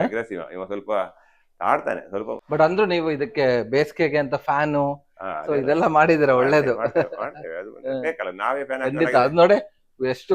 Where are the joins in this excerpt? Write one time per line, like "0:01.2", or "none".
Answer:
0:02.4